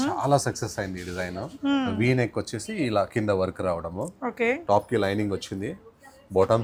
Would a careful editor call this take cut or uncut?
uncut